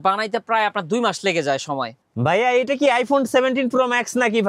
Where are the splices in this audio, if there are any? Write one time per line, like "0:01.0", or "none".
0:02.0